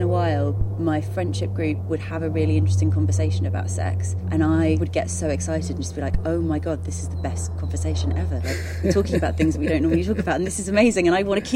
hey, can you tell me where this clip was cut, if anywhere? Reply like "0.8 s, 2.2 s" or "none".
1.8 s, 4.1 s, 4.8 s